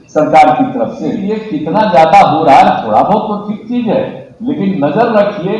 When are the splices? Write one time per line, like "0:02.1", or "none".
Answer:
0:01.2